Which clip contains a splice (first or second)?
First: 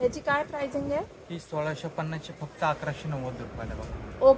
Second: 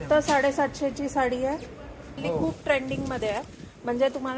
second